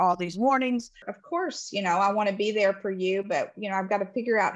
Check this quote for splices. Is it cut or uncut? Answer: cut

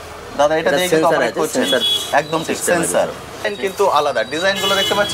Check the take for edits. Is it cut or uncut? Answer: cut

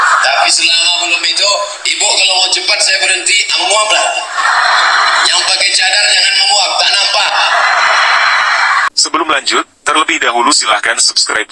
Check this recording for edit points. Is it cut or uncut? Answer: cut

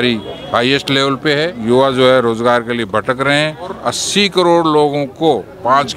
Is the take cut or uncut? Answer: cut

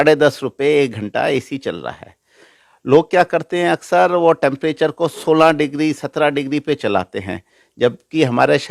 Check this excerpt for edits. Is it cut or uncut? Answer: uncut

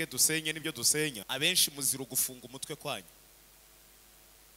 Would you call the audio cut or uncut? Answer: cut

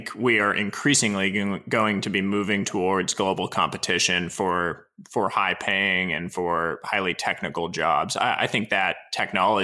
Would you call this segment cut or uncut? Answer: uncut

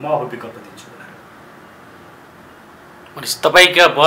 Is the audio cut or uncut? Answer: uncut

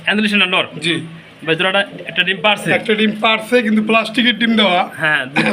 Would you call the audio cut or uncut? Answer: uncut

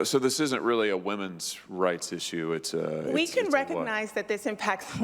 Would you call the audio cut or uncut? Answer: cut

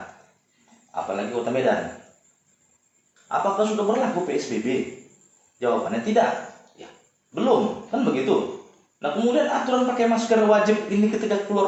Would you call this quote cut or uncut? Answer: uncut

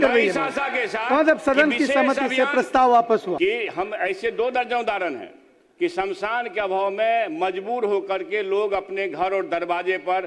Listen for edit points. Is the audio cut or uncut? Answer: cut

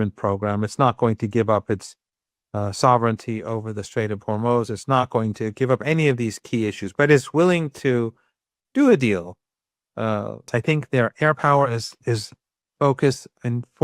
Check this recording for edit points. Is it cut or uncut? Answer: cut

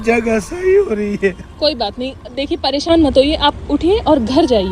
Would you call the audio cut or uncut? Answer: uncut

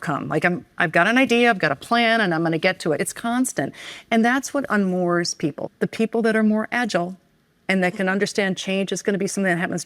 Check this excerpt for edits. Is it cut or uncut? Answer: cut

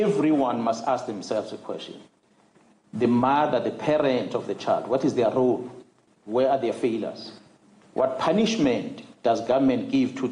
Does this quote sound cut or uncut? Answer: uncut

